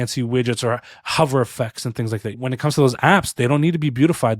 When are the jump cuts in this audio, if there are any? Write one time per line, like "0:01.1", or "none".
0:02.4